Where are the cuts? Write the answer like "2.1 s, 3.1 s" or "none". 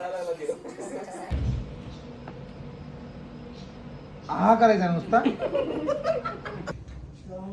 none